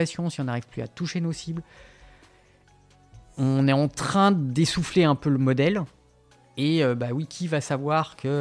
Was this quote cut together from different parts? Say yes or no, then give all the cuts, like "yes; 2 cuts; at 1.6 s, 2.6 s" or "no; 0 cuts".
no; 0 cuts